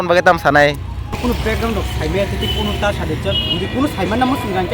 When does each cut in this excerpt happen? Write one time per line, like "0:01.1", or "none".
0:01.2